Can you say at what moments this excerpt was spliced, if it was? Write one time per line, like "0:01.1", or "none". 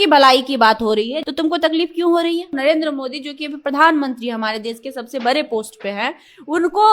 0:01.2
0:02.5

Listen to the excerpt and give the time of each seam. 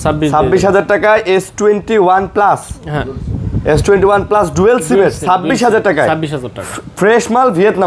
none

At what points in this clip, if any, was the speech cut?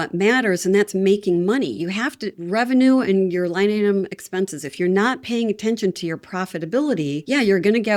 none

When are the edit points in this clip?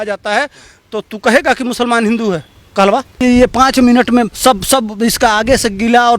0:03.2
0:04.3

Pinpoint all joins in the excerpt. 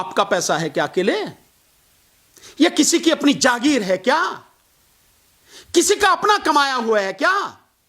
none

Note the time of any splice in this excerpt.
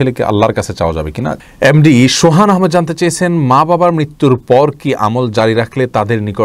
0:01.3

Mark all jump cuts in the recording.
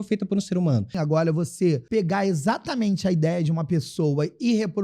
0:01.0
0:01.8

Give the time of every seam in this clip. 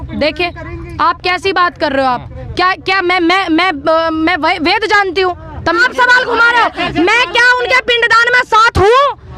0:05.8

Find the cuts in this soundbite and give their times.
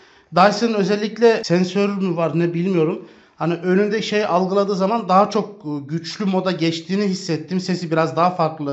0:01.4

